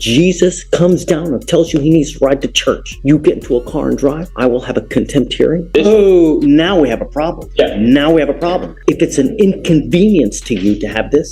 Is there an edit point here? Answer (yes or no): yes